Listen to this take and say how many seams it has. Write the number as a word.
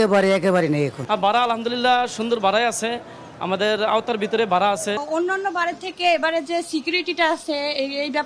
two